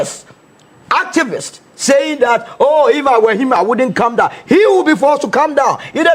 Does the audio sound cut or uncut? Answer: uncut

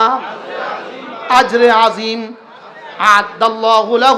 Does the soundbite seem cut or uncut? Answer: uncut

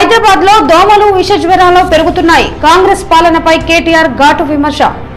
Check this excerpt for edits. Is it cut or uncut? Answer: uncut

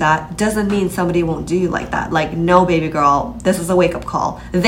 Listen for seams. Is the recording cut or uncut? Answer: uncut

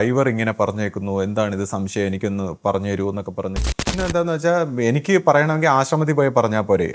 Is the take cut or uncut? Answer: cut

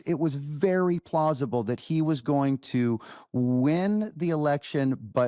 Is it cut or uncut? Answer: uncut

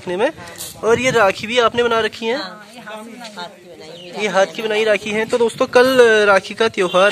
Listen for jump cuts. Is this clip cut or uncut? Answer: uncut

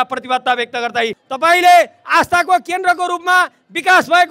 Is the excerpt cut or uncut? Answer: cut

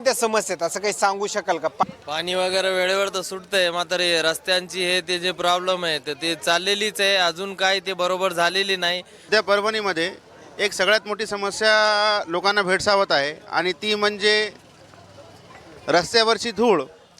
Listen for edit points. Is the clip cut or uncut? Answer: cut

